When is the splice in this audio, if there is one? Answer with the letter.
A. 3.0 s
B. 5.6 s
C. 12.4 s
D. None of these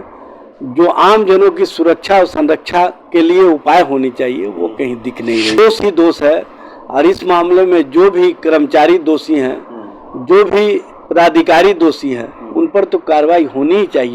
B